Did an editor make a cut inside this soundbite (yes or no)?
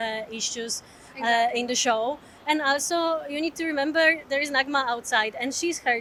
no